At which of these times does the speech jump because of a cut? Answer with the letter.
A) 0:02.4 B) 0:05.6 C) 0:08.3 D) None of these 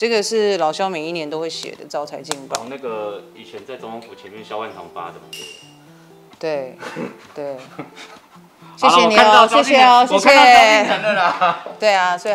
D